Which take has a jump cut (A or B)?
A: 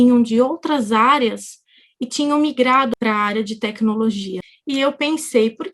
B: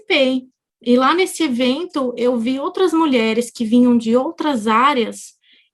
A